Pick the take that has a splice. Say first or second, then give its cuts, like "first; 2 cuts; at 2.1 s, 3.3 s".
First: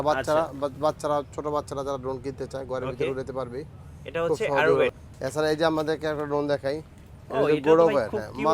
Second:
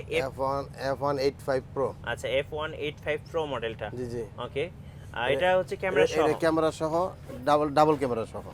first; 1 cut; at 5.0 s